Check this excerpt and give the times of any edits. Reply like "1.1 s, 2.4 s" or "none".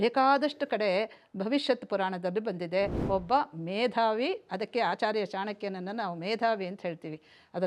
3.0 s

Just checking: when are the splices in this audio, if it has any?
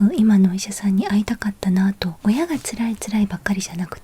2.1 s

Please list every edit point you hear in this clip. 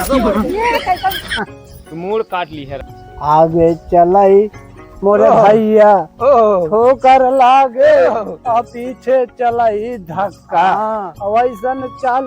2.8 s

